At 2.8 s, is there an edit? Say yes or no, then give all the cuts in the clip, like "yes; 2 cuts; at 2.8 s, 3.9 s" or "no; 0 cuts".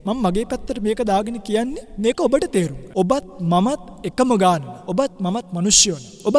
yes; 2 cuts; at 2.8 s, 4.8 s